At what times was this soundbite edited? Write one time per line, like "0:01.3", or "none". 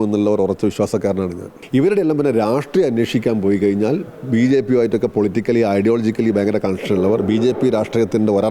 0:01.5